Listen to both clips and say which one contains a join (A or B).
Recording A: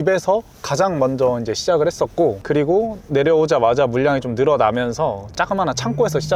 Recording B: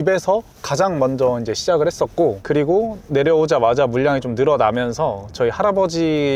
A